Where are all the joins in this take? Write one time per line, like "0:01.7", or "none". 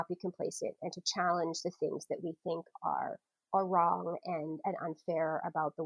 none